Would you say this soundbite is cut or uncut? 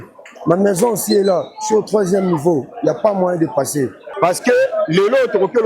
cut